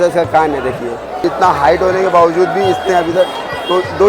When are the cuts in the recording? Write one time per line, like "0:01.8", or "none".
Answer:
0:01.2